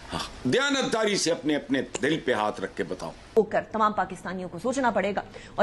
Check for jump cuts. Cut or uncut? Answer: cut